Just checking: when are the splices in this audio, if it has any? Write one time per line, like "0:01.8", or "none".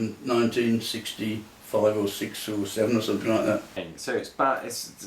0:03.9